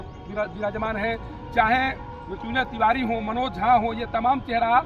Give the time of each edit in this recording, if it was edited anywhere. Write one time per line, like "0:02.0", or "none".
none